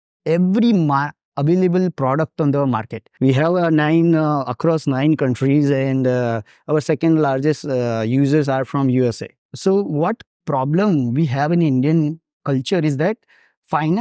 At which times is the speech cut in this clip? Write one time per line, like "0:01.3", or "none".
0:03.1
0:09.4